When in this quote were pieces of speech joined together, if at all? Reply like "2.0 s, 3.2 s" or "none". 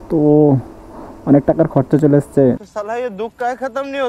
2.7 s